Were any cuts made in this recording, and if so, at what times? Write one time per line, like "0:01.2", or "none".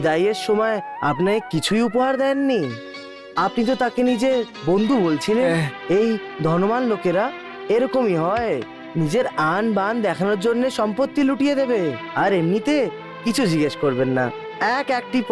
0:05.5